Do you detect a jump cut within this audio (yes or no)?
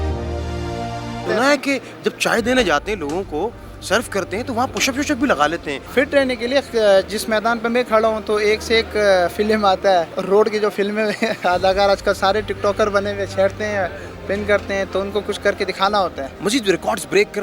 no